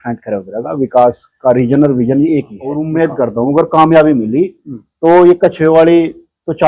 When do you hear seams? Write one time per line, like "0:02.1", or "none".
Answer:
0:02.9